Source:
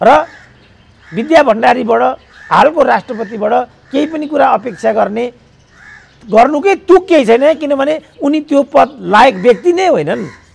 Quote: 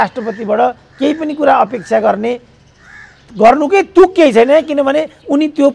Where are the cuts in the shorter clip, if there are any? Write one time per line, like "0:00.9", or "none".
none